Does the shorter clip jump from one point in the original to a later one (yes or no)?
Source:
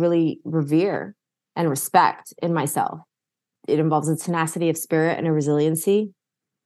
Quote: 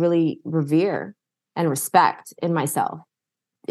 no